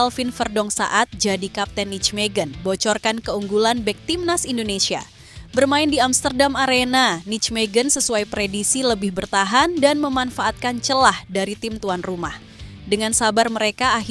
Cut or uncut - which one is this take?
uncut